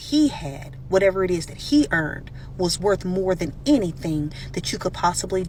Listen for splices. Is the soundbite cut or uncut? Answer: uncut